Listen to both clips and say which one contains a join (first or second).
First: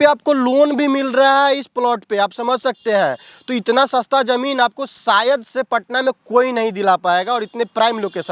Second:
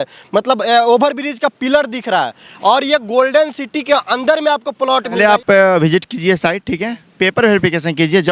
second